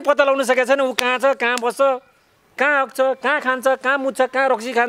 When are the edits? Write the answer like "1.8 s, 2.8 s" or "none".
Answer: 2.6 s